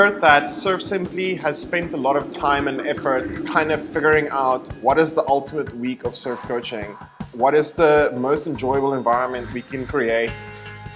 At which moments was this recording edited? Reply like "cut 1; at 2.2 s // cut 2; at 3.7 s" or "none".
cut 1; at 7.2 s